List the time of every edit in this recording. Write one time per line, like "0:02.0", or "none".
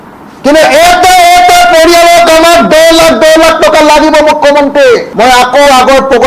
0:05.1